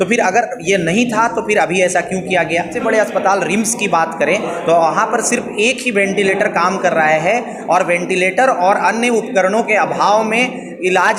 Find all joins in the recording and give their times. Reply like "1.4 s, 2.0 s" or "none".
2.7 s

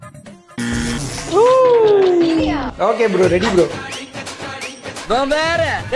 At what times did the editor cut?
2.6 s

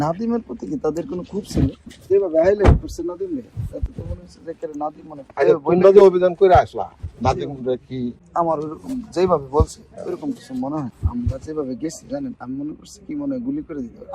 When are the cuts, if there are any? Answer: 2.0 s, 8.2 s, 10.9 s

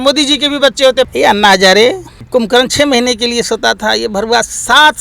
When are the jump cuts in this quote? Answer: 1.1 s, 2.1 s

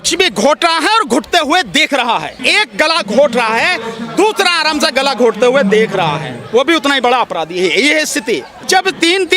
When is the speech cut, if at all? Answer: 2.4 s, 8.6 s

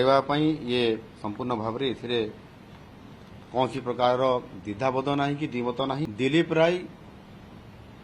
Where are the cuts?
6.1 s

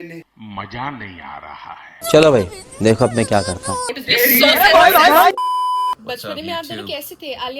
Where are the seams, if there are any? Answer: 6.0 s

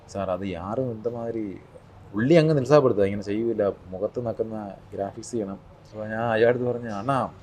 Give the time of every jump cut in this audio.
5.8 s

